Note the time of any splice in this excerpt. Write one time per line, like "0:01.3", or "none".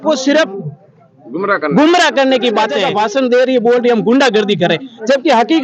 0:02.8